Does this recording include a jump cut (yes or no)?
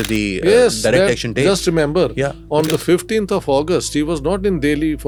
no